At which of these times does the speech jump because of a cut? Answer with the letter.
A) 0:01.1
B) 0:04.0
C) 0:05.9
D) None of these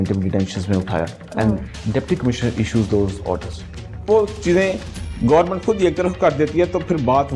B